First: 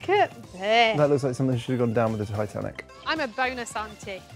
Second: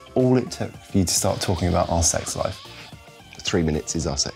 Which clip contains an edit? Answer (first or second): first